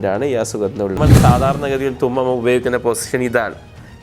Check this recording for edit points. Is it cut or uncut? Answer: cut